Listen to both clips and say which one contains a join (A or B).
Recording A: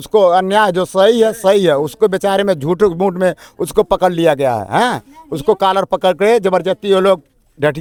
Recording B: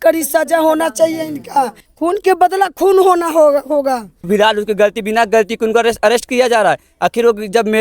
B